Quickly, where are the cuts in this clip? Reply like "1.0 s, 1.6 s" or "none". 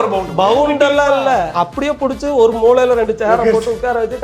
1.5 s